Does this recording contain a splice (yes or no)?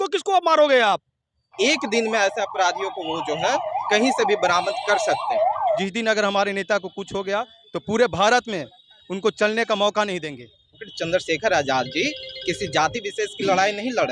yes